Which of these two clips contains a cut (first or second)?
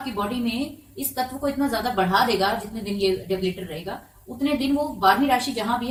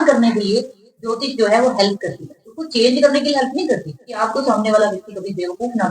second